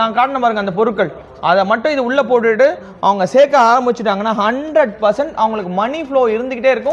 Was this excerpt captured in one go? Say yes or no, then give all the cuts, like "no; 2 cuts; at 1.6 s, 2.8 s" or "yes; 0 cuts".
yes; 0 cuts